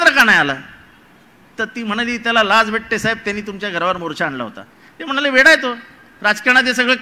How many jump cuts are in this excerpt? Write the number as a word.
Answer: zero